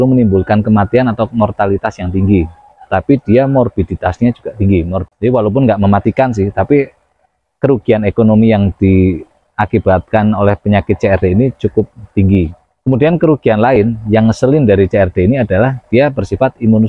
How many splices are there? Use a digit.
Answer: 2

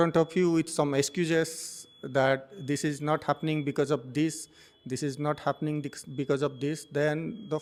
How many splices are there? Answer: 0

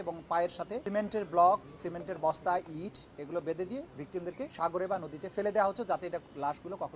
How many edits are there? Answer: 3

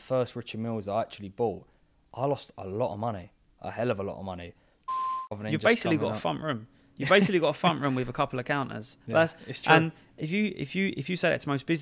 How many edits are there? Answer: 1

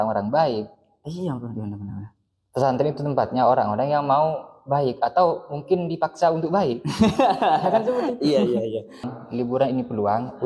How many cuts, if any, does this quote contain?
1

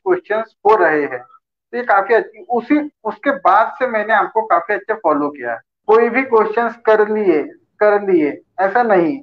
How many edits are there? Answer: 1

